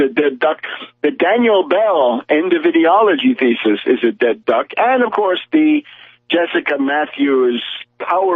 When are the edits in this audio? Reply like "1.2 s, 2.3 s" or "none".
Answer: 5.9 s